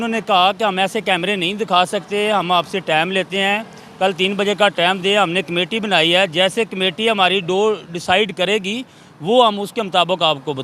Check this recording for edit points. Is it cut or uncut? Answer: uncut